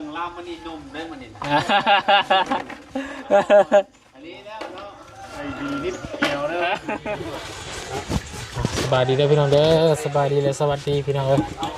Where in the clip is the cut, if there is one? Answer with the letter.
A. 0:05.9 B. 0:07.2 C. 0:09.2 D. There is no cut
B